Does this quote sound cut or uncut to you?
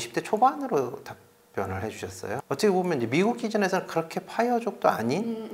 cut